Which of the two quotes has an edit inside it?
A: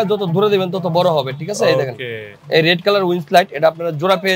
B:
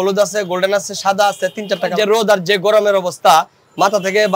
B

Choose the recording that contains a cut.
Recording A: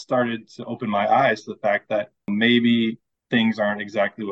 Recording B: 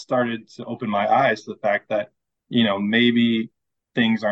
A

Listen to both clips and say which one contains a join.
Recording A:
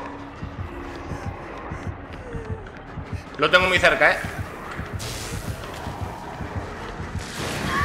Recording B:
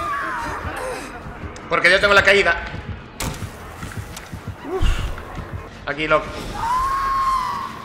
B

